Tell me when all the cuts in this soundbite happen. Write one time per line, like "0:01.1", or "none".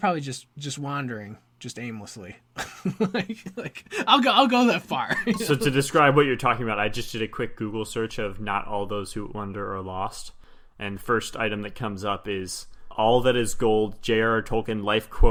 none